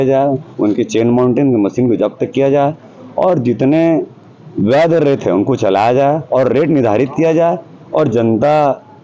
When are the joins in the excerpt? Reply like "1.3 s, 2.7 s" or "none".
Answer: none